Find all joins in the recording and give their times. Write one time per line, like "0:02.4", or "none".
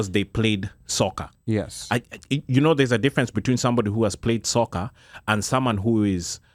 none